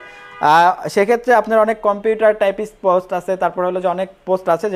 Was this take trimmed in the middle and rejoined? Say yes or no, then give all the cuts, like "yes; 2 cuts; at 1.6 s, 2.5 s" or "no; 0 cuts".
no; 0 cuts